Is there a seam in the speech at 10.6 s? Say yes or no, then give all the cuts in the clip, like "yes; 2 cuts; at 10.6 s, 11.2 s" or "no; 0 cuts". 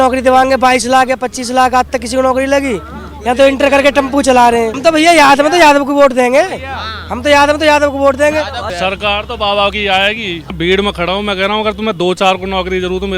yes; 3 cuts; at 4.7 s, 8.6 s, 10.6 s